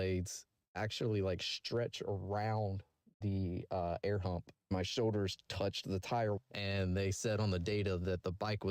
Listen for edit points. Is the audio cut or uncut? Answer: cut